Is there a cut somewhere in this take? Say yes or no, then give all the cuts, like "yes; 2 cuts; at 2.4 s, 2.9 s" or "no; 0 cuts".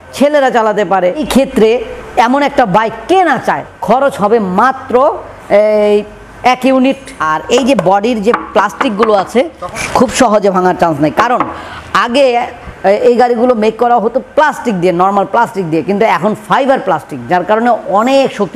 yes; 4 cuts; at 1.2 s, 3.6 s, 7.1 s, 9.6 s